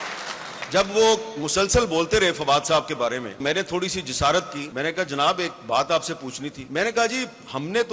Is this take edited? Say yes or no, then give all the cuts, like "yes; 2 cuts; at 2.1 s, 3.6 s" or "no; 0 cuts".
yes; 3 cuts; at 3.4 s, 4.6 s, 6.6 s